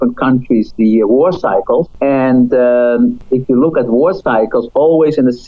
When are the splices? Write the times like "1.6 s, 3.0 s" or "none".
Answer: 1.9 s, 3.2 s

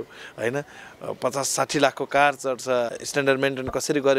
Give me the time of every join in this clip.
2.9 s

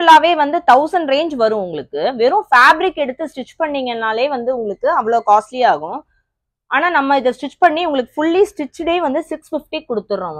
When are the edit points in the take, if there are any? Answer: none

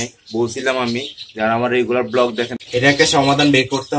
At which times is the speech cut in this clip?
2.6 s

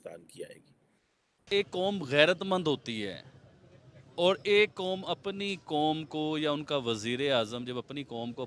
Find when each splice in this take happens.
1.5 s

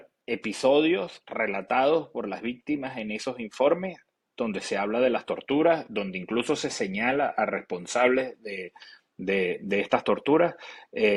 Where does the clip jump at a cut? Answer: none

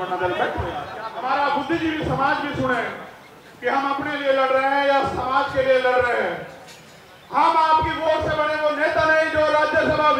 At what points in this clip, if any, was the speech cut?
1.0 s

